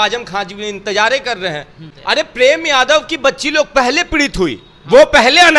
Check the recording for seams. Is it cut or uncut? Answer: cut